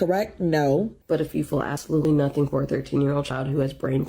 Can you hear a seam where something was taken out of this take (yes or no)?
yes